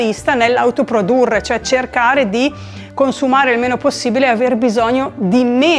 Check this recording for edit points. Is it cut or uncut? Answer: uncut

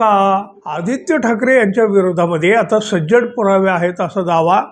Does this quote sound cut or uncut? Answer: cut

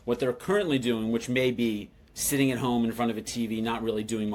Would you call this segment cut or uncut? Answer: uncut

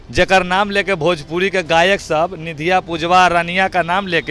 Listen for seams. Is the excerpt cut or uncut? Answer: uncut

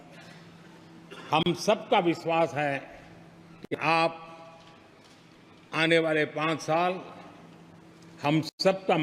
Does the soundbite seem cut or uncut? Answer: uncut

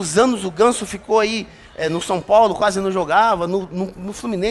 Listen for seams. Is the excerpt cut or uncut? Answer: uncut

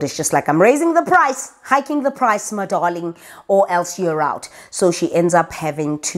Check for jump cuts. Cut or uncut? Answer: uncut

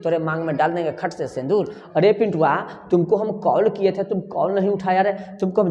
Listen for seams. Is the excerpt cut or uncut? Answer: cut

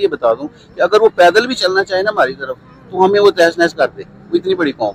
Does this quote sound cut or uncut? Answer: uncut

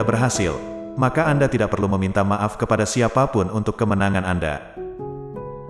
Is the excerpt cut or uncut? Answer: cut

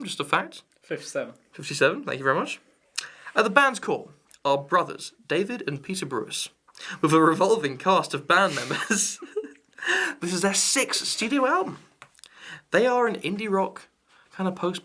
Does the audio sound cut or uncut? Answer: cut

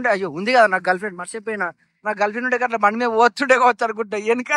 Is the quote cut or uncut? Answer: uncut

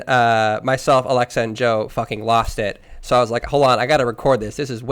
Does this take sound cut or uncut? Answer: uncut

